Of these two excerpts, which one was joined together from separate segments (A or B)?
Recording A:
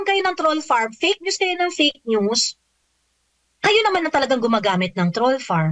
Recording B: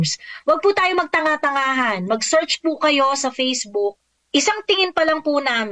B